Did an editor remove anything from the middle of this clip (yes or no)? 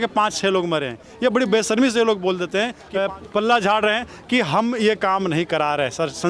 yes